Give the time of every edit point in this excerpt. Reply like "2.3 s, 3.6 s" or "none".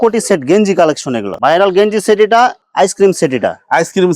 1.3 s